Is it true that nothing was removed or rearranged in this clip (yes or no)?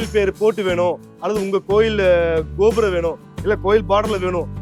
yes